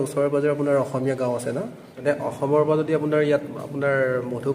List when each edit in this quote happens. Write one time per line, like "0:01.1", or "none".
0:02.0